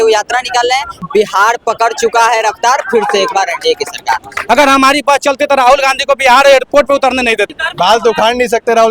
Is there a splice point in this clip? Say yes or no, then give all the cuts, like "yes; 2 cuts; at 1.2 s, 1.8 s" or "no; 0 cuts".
yes; 3 cuts; at 1.0 s, 4.4 s, 7.5 s